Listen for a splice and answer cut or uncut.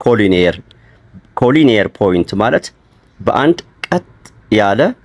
uncut